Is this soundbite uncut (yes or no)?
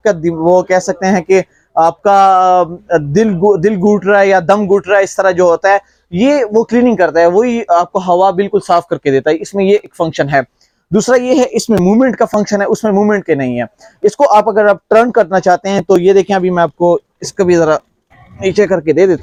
yes